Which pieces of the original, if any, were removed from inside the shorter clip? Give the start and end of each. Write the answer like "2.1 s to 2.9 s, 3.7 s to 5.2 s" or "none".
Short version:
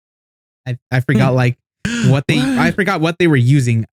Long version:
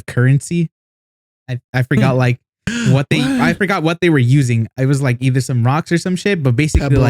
none